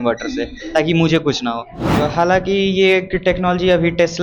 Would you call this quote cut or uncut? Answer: cut